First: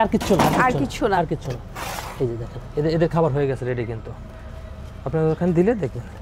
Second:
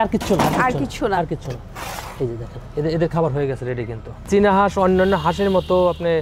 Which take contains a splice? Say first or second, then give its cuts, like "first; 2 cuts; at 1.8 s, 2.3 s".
second; 1 cut; at 4.2 s